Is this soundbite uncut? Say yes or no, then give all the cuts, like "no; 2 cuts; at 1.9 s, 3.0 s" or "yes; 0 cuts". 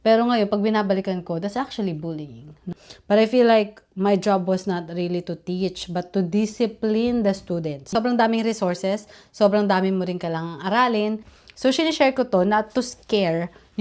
no; 3 cuts; at 2.7 s, 7.8 s, 11.3 s